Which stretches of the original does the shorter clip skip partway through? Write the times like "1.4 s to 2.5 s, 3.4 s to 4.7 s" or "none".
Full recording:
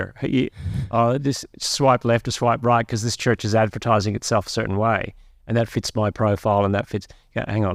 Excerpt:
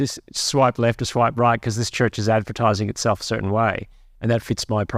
none

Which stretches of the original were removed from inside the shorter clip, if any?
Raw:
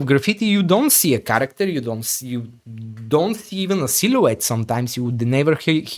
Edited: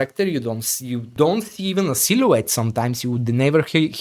2.4 s to 3.0 s

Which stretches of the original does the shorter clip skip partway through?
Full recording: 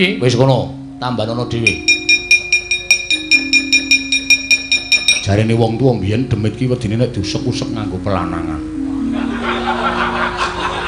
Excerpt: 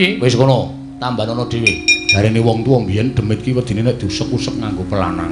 2.0 s to 5.2 s

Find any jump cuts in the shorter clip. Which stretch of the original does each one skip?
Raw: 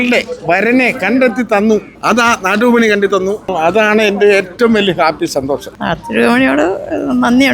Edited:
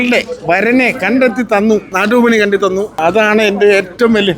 1.9 s to 2.4 s, 3.4 s to 3.5 s

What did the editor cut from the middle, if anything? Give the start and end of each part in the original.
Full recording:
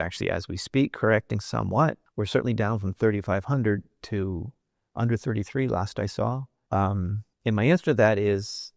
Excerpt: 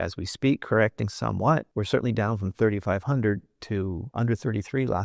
2.0 s to 2.1 s, 4.5 s to 4.9 s

